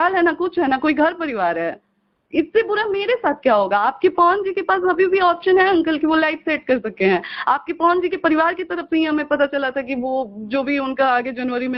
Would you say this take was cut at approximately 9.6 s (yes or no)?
no